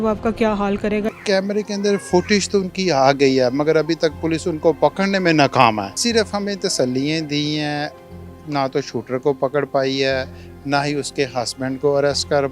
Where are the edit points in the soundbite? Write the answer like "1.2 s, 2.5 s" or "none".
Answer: 1.1 s, 5.9 s